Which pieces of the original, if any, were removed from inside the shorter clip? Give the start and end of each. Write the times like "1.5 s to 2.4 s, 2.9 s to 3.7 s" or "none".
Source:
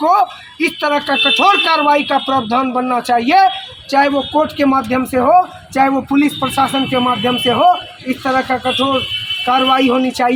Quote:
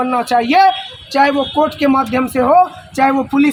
none